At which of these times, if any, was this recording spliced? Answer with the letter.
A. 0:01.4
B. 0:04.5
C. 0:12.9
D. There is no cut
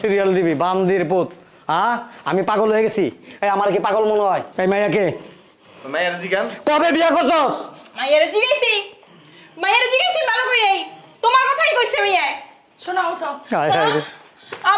B